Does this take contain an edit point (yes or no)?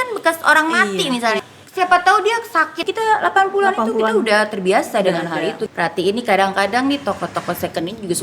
yes